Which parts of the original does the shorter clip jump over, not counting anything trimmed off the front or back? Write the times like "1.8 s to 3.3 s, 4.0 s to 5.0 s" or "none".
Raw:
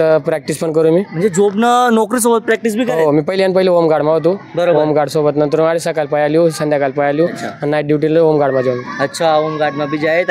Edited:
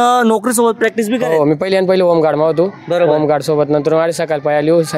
none